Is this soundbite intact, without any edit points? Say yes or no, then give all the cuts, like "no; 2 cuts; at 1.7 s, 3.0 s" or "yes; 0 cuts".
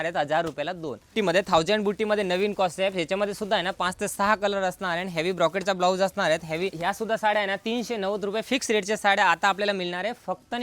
no; 2 cuts; at 1.1 s, 6.8 s